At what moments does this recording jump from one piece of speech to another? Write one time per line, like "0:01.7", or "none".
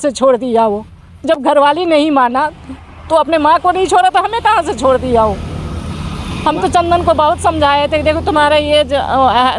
none

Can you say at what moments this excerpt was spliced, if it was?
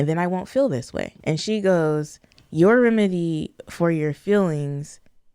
0:01.1

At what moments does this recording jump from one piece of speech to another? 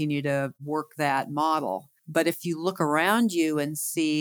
none

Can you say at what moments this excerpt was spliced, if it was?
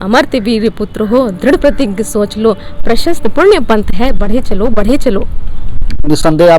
none

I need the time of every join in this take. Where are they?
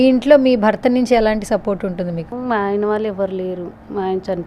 0:02.3

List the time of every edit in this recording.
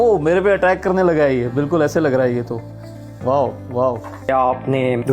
0:04.1

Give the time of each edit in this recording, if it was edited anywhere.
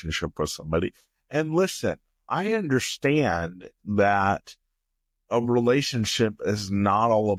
none

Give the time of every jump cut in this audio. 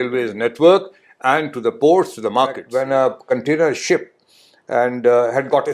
0:02.6

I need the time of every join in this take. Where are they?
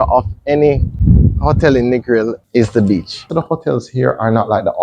0:00.9
0:02.4
0:03.3

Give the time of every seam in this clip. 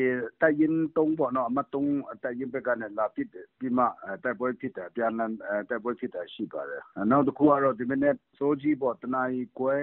0:06.8
0:08.3

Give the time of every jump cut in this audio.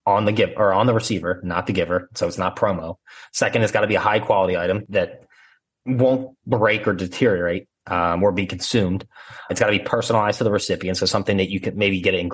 0:04.8
0:09.5

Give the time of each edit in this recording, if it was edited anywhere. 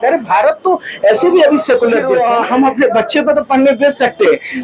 0:02.1

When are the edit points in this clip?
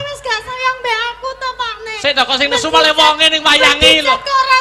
none

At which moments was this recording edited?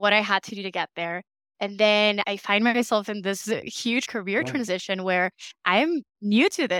0:02.2
0:04.1

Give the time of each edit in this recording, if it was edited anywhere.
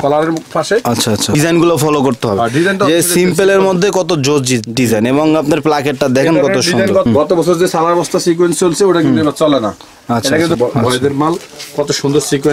0:01.3
0:07.1
0:10.6

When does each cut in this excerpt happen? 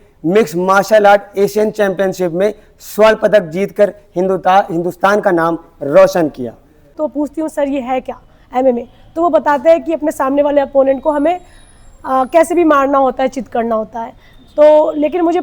0:06.9

